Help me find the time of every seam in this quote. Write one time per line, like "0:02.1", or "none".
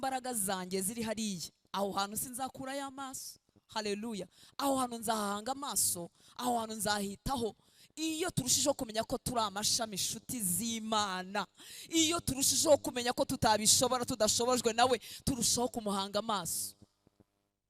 none